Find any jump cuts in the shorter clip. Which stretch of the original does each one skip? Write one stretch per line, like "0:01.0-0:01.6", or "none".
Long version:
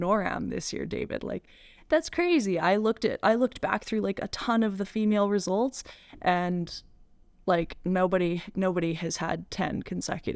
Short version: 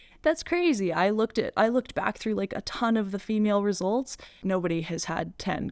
0:06.0-0:08.5

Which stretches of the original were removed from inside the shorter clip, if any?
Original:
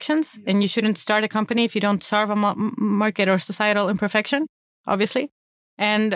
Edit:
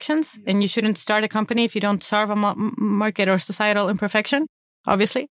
none

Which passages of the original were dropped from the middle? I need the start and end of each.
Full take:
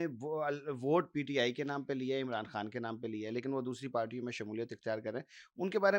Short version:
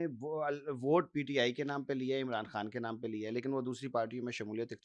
none

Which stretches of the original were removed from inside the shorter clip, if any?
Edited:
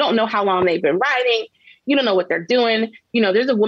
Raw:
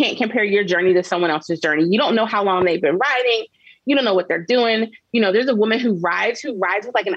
none

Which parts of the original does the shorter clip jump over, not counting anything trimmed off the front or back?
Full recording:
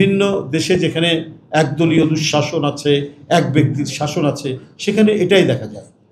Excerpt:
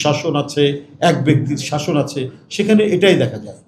none

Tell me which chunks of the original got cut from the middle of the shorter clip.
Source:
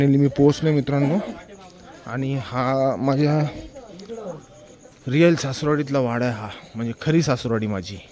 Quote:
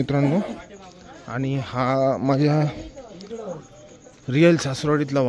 none

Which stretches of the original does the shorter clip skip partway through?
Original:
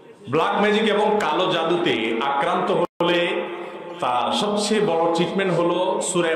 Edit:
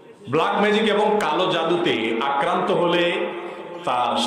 0:02.9-0:03.0

